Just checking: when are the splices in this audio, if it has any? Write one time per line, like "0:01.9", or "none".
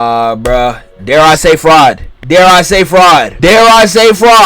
0:02.1
0:03.3